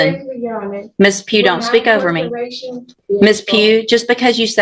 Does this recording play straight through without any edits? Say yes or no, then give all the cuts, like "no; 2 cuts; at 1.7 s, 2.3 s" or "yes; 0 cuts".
no; 1 cut; at 2.9 s